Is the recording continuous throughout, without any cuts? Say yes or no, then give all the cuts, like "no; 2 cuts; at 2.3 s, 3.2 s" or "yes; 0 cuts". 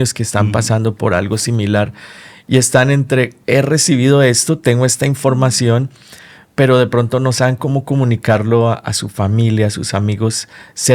no; 1 cut; at 3.4 s